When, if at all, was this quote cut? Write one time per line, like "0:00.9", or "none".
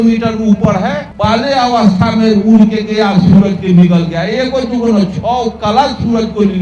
0:01.1